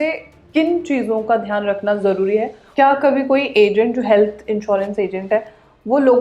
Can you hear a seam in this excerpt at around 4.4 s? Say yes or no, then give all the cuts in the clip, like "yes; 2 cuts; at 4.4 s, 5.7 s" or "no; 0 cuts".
no; 1 cut; at 2.6 s